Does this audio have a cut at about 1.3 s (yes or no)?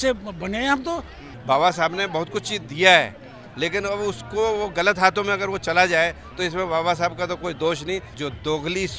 yes